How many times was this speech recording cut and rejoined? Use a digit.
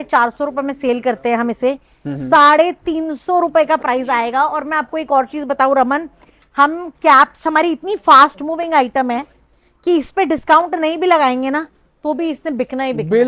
0